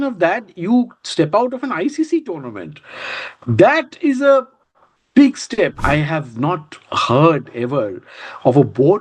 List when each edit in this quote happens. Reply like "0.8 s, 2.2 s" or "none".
5.8 s